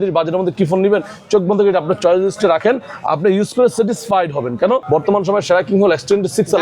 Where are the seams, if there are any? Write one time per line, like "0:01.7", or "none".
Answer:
0:04.8